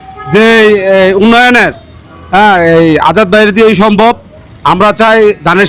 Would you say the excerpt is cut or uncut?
uncut